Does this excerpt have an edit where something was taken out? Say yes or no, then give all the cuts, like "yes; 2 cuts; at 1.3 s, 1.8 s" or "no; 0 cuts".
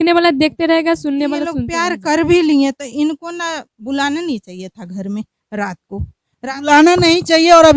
yes; 1 cut; at 1.6 s